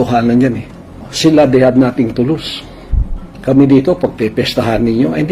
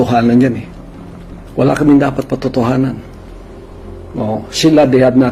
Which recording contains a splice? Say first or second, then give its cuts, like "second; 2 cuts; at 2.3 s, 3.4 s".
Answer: first; 1 cut; at 1.1 s